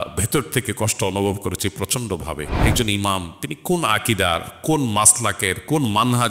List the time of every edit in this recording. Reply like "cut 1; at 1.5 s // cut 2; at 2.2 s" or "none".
cut 1; at 2.5 s